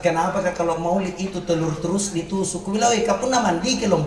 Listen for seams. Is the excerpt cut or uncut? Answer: uncut